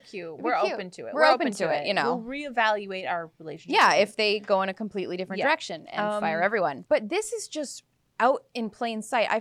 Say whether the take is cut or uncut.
cut